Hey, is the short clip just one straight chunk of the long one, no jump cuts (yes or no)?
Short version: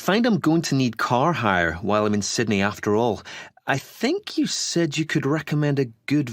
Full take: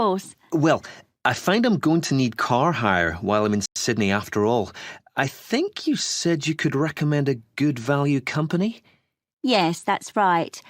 no